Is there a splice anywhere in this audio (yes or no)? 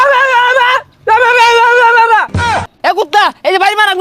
yes